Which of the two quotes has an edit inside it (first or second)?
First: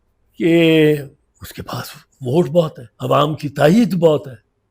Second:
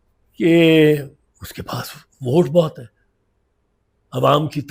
first